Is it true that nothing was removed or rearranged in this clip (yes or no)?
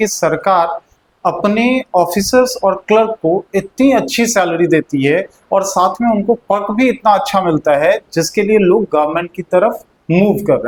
yes